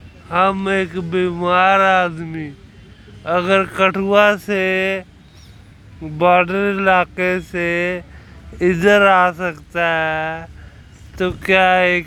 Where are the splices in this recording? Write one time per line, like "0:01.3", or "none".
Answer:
none